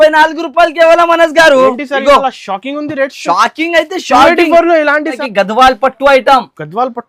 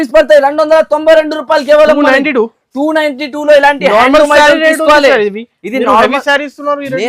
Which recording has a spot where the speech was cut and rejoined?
first; 1 cut; at 5.2 s

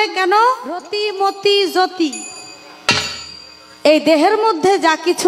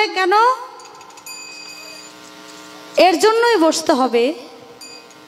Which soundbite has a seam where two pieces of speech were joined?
first; 1 cut; at 0.9 s

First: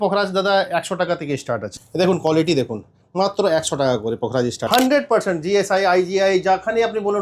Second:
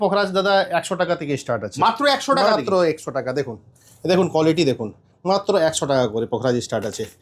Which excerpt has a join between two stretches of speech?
first; 2 cuts; at 1.7 s, 4.7 s

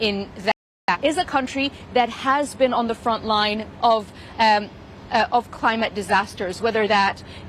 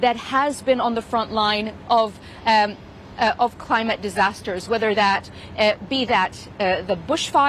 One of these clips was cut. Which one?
first; 1 cut; at 0.9 s

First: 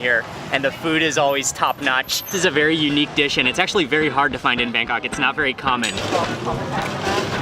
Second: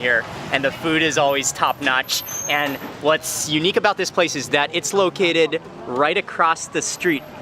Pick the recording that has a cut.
first; 2 cuts; at 2.3 s, 6.0 s

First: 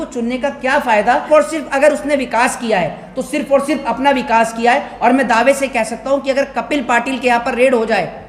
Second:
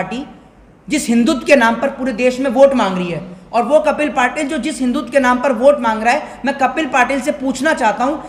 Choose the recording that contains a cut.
first; 1 cut; at 1.2 s

